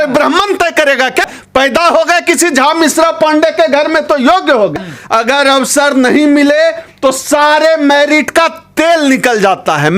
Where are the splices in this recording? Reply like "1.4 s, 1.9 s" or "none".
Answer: 1.3 s, 4.8 s